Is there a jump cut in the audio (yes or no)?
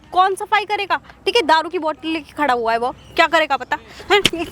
no